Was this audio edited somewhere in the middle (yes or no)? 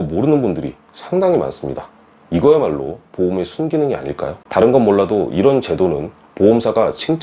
yes